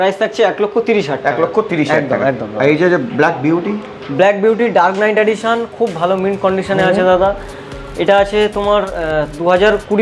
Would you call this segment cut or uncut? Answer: uncut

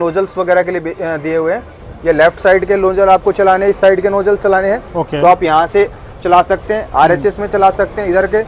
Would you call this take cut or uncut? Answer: uncut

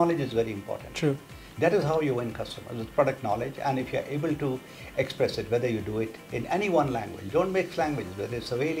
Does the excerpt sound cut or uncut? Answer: uncut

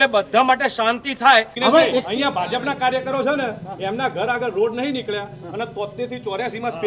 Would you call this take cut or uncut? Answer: cut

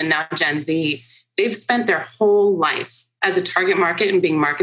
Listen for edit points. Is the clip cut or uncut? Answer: uncut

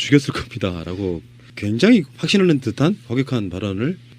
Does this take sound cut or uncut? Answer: cut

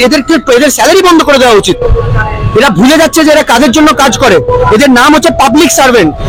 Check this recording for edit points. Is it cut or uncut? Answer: uncut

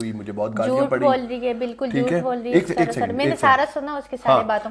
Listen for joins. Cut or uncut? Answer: uncut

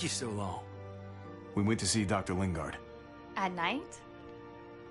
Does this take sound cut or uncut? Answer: cut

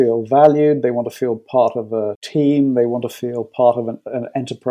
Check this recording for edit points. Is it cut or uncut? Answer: cut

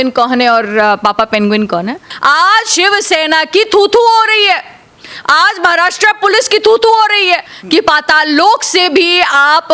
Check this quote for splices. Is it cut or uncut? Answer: cut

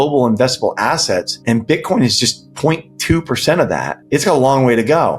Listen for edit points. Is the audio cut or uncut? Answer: cut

